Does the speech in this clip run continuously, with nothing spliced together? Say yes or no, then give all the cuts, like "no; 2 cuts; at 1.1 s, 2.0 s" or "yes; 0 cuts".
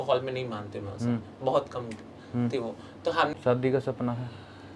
no; 1 cut; at 3.3 s